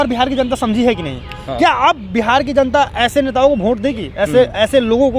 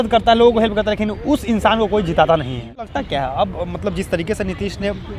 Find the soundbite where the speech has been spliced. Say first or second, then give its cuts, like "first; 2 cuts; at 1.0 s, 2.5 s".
second; 1 cut; at 2.7 s